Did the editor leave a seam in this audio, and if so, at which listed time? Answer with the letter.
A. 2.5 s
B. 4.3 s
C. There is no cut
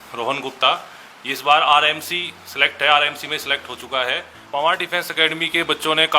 B